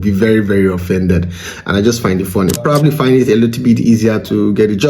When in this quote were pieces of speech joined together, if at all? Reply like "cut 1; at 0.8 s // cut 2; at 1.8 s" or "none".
cut 1; at 2.6 s